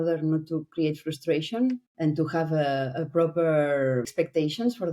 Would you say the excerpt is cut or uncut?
cut